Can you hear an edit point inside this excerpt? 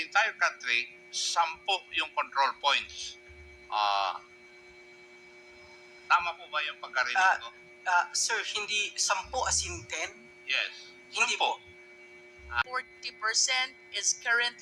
yes; 1 cut; at 12.6 s

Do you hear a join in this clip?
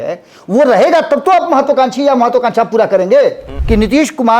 yes; 1 cut; at 3.5 s

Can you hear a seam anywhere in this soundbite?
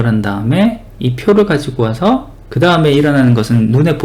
no; 0 cuts

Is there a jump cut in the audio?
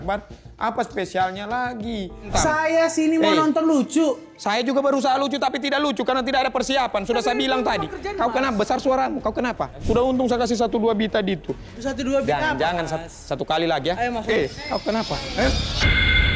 yes; 2 cuts; at 2.2 s, 9.8 s

